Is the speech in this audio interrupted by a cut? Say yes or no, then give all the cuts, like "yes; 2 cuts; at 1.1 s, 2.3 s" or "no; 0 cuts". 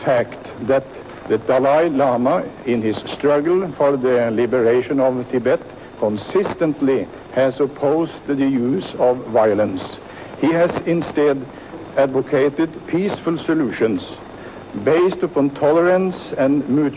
yes; 1 cut; at 13.6 s